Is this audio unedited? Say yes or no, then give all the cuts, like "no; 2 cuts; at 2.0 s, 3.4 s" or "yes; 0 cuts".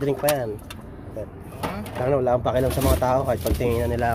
yes; 0 cuts